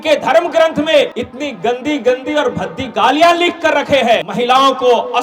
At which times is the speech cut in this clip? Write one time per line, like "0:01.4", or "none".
0:01.2
0:04.3